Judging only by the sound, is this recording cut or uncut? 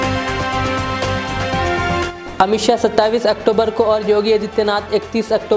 cut